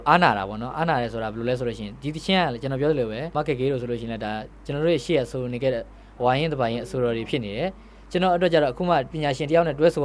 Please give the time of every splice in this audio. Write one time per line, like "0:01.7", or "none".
0:03.3
0:09.1